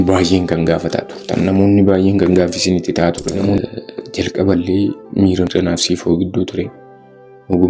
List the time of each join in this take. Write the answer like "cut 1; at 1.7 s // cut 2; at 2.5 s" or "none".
cut 1; at 3.6 s // cut 2; at 5.5 s